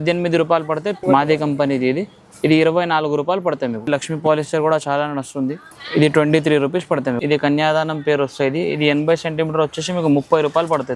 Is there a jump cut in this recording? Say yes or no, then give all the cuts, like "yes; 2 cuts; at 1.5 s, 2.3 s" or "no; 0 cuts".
yes; 3 cuts; at 1.0 s, 3.9 s, 7.2 s